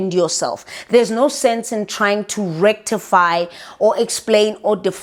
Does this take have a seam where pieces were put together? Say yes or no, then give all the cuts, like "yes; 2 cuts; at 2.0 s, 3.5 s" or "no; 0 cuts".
no; 0 cuts